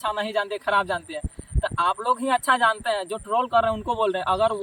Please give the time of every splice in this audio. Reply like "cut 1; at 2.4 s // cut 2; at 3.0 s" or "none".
none